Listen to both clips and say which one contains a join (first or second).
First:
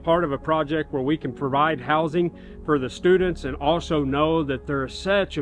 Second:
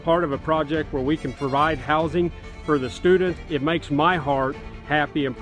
second